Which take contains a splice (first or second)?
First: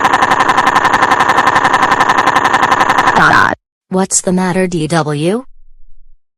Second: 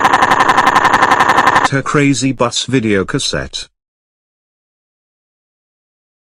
first